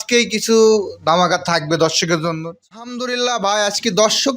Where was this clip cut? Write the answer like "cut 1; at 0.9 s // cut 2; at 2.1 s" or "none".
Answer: cut 1; at 2.7 s